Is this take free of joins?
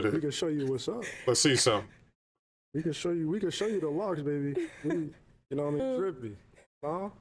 no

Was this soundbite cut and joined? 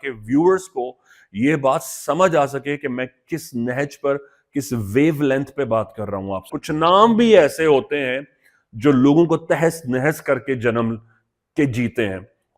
yes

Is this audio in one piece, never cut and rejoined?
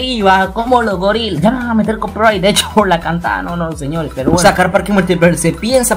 no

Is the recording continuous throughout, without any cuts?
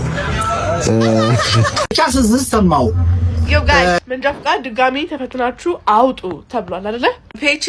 no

